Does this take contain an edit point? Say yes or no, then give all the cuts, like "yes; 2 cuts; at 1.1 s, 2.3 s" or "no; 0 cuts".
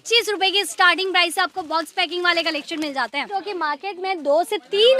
yes; 1 cut; at 3.4 s